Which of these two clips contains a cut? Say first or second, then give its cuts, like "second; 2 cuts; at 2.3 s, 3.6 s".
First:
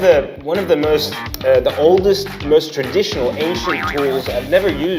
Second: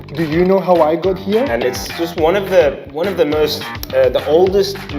second; 1 cut; at 1.5 s